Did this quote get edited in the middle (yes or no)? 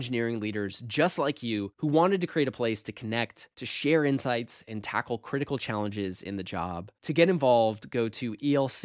no